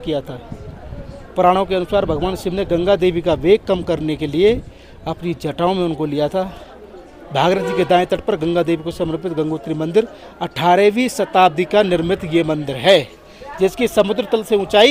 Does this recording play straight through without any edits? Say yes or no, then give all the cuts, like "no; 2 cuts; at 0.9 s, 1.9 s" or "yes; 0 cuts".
yes; 0 cuts